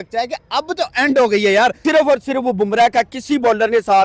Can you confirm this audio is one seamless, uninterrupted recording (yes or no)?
no